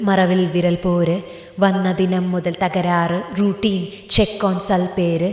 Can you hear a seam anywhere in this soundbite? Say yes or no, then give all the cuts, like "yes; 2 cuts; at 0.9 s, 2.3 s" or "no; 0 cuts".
no; 0 cuts